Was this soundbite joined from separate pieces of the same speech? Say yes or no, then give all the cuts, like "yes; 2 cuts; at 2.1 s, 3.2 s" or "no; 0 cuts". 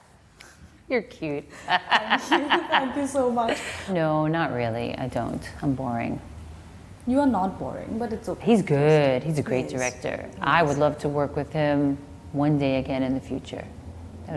yes; 2 cuts; at 3.9 s, 8.4 s